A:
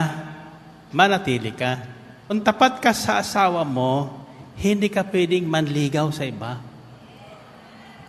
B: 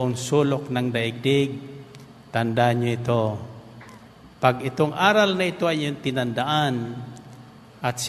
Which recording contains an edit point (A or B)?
A